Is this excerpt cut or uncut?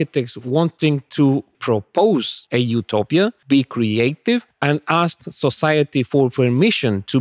cut